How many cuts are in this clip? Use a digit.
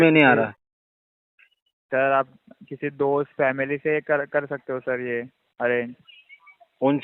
0